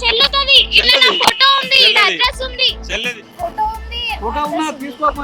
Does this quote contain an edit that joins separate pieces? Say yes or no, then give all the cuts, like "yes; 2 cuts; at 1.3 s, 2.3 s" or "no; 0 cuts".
yes; 1 cut; at 3.1 s